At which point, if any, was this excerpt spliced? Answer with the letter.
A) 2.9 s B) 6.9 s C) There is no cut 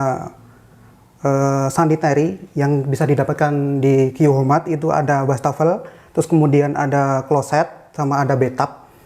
C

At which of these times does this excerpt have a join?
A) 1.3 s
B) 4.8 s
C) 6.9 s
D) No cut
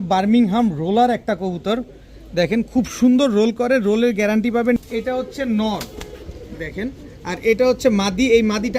B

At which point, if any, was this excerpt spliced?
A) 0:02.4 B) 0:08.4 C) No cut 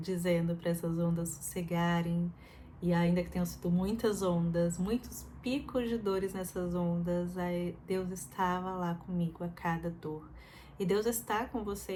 C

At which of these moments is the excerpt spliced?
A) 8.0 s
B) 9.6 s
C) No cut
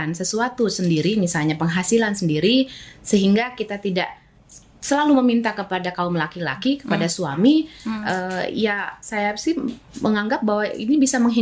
C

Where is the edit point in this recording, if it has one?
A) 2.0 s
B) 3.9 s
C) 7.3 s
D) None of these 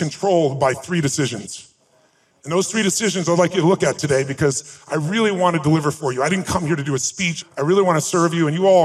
C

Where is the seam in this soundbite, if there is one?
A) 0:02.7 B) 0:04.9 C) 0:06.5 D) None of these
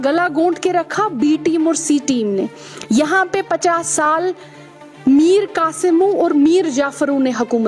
D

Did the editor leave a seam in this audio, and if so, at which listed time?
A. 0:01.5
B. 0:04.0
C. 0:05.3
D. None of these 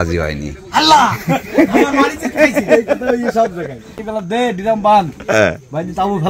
B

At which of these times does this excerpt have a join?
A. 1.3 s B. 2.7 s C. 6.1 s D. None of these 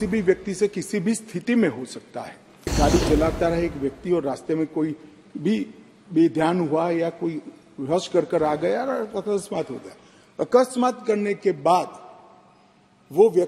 B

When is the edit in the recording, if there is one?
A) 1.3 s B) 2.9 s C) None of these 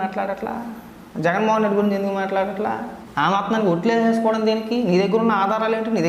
C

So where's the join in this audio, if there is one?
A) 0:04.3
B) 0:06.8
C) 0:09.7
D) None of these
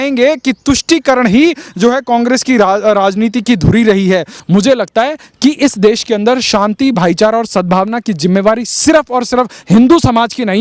A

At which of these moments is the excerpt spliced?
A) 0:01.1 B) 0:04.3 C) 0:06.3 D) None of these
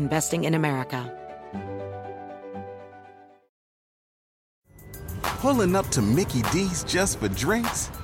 A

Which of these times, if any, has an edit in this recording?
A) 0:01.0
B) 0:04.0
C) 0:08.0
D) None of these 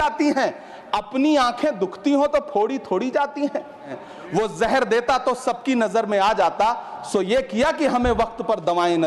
B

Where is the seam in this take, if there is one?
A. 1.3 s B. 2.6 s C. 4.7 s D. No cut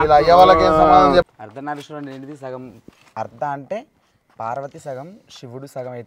A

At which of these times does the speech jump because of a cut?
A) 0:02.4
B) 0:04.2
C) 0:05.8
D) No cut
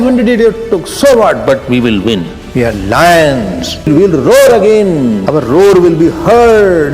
A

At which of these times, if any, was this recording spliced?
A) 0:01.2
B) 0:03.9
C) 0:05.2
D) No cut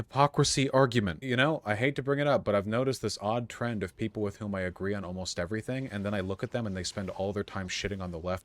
A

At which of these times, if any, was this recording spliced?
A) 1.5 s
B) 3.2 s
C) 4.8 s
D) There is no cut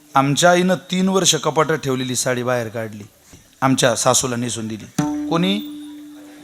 B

